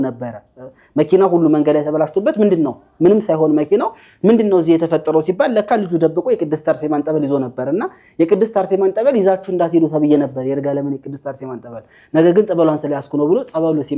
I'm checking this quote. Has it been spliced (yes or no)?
no